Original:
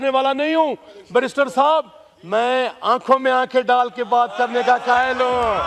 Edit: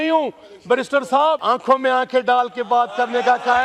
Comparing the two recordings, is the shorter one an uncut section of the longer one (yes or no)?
no